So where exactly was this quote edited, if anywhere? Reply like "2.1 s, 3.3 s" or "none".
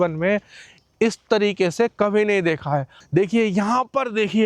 3.0 s

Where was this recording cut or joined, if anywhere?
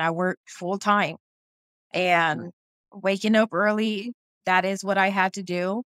2.9 s, 4.4 s

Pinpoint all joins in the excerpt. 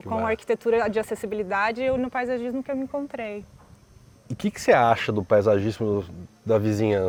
none

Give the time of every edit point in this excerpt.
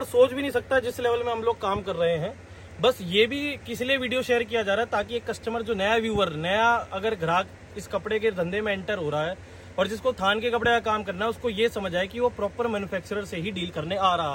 none

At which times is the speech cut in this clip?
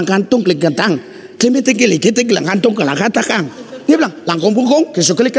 1.2 s, 3.4 s

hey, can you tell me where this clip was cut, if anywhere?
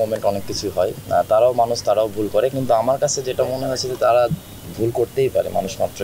none

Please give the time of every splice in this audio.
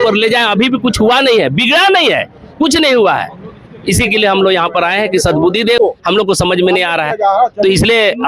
5.8 s

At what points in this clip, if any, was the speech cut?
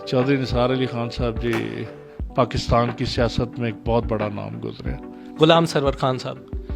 5.3 s

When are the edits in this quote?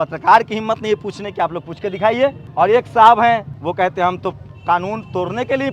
2.4 s, 3.5 s

